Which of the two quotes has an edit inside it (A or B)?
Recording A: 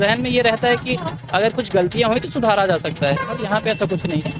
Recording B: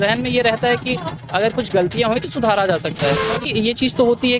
B